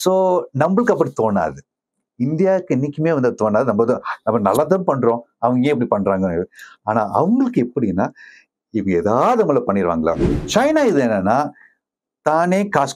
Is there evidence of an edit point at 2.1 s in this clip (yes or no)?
no